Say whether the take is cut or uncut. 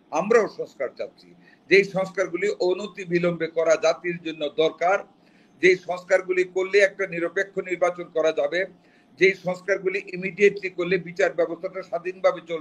uncut